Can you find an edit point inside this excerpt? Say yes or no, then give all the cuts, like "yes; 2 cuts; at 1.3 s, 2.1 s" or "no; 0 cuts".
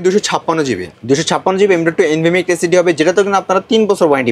yes; 1 cut; at 0.9 s